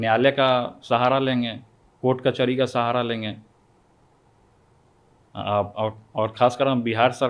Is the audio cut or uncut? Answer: uncut